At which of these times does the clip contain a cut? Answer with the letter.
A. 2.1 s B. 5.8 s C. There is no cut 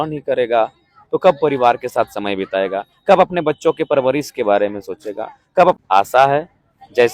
B